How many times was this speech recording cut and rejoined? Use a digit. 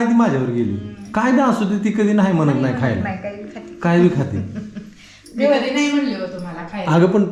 0